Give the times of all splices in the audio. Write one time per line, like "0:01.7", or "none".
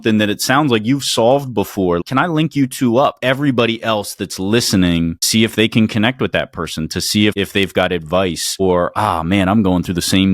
0:02.0
0:03.2
0:05.2